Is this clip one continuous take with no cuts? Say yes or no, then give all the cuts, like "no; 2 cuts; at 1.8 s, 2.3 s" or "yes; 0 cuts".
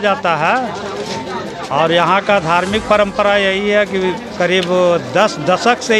yes; 0 cuts